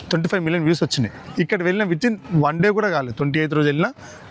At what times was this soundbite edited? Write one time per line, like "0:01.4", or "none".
0:01.2